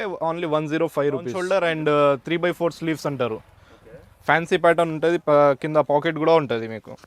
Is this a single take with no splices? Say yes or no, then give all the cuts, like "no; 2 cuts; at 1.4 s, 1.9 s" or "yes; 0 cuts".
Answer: no; 1 cut; at 1.4 s